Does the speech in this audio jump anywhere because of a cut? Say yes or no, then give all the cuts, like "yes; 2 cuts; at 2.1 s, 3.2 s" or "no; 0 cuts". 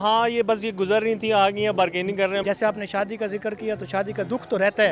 yes; 1 cut; at 2.4 s